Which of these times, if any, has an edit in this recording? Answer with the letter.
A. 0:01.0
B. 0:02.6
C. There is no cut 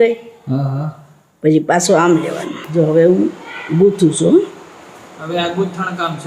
B